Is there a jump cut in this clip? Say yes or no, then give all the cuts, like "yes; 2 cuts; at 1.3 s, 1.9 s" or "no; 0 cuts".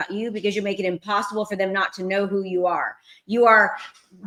no; 0 cuts